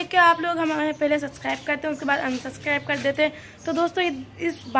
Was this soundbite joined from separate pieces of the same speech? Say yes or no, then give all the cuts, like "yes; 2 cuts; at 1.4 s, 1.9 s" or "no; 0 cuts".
no; 0 cuts